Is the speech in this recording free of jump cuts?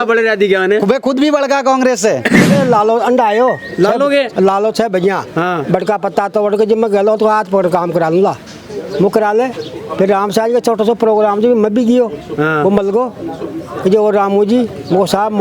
no; 1 cut; at 2.5 s

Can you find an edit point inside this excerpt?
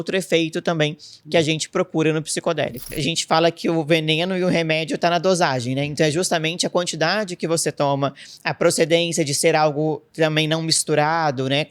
yes; 1 cut; at 2.9 s

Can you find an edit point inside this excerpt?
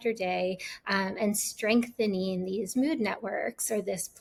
no; 0 cuts

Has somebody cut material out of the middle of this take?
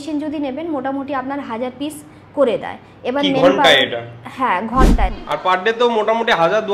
yes; 1 cut; at 5.2 s

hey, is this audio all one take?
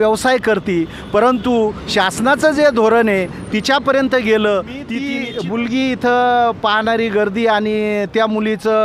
no; 1 cut; at 5.0 s

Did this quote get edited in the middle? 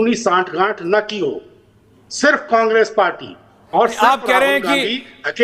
no; 0 cuts

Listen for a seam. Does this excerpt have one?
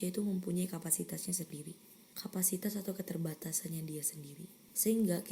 no; 0 cuts

